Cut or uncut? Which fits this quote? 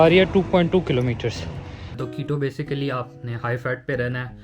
cut